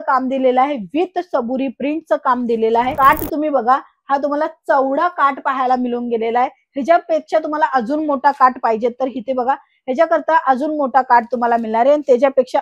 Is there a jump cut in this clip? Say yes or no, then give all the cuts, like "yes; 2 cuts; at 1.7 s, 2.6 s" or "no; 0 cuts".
yes; 1 cut; at 2.9 s